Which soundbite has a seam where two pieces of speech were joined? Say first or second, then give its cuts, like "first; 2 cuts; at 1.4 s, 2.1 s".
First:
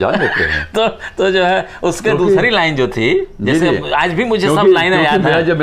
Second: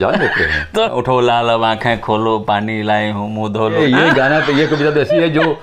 second; 2 cuts; at 0.9 s, 3.8 s